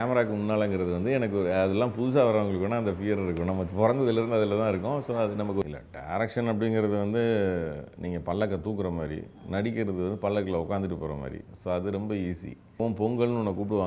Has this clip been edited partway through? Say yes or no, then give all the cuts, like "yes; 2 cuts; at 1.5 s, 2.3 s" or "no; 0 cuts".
yes; 2 cuts; at 5.6 s, 12.8 s